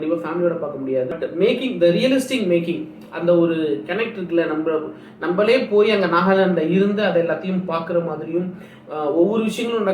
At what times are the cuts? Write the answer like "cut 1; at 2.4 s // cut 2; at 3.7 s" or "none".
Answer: cut 1; at 1.1 s